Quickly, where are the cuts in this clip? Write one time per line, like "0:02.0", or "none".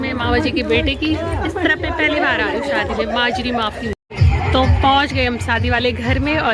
none